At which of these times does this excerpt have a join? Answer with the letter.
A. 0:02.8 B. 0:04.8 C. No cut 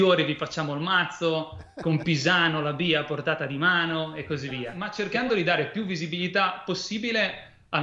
B